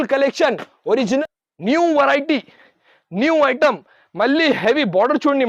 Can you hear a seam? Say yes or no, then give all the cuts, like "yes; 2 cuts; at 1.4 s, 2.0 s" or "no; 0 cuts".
yes; 1 cut; at 1.2 s